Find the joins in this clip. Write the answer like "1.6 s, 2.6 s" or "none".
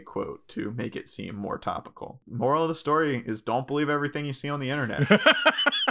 2.2 s, 4.9 s